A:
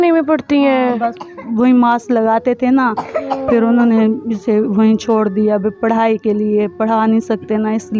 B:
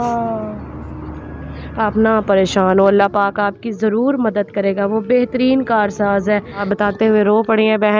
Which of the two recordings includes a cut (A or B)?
B